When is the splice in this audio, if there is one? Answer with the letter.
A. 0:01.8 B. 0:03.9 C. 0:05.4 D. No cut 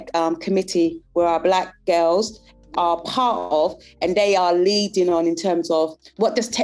D